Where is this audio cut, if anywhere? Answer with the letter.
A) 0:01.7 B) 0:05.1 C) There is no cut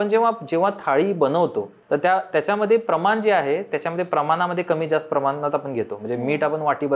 A